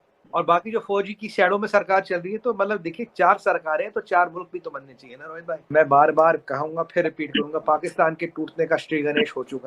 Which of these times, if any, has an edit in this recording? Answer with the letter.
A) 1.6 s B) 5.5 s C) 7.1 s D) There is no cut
B